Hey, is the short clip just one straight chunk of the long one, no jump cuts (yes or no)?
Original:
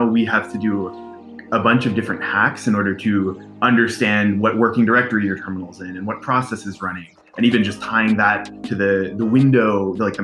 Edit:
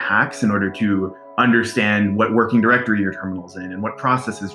yes